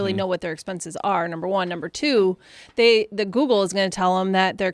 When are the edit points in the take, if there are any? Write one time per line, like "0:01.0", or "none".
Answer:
none